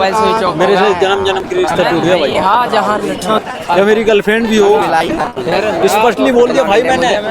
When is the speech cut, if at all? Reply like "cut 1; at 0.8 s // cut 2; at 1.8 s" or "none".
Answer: cut 1; at 3.4 s